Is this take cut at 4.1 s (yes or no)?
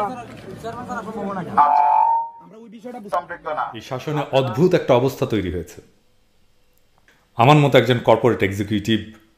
yes